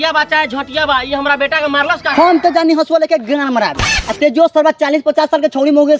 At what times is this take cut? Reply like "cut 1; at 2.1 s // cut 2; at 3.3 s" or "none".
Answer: cut 1; at 2.1 s